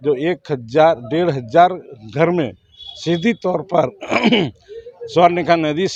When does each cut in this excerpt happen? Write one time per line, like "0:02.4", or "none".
none